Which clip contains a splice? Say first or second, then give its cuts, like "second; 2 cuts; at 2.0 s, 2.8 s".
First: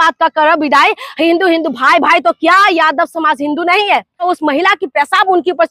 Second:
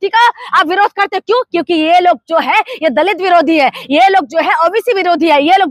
first; 1 cut; at 4.2 s